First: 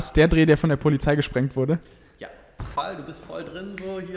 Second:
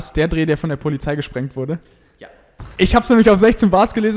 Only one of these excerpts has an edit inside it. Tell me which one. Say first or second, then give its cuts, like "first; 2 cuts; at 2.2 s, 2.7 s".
first; 1 cut; at 2.7 s